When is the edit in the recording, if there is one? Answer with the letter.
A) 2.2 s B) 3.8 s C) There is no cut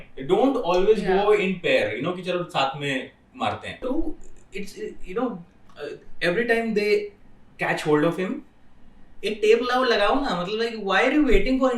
B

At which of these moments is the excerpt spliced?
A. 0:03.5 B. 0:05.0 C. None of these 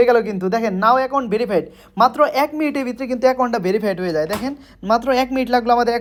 C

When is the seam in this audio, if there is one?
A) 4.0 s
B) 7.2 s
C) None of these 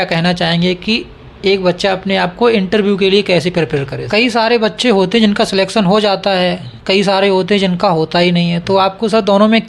A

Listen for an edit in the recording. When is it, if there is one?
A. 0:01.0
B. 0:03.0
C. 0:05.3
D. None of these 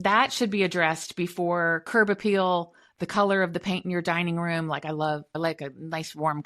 C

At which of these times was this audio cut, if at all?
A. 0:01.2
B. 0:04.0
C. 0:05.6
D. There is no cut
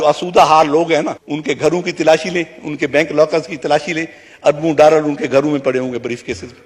A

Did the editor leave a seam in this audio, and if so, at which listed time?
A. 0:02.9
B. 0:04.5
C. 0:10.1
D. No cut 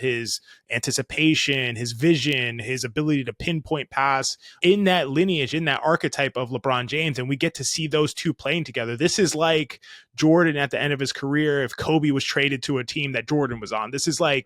B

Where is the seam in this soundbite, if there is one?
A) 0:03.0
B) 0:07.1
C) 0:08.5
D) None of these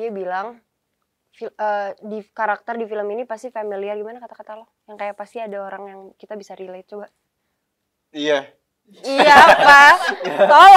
D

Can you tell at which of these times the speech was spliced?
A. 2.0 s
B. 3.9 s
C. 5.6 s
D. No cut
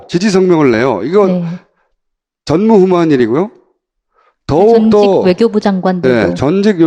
D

